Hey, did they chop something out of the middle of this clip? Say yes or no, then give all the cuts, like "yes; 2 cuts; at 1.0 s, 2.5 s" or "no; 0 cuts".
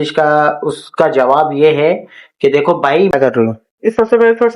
yes; 1 cut; at 3.1 s